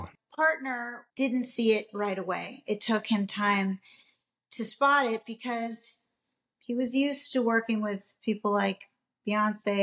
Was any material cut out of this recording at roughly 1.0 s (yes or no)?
yes